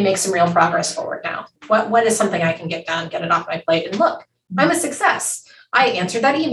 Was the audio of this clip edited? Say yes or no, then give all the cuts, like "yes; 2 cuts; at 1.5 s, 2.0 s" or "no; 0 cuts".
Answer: no; 0 cuts